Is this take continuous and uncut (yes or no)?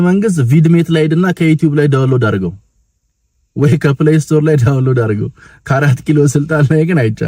yes